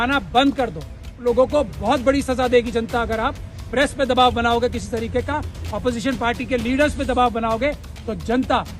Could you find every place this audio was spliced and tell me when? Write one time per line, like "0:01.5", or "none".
0:01.2